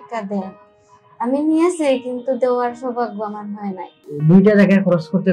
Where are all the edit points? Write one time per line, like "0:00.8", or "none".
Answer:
0:04.1